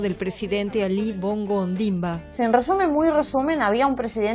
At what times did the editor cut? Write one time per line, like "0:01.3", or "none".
0:02.3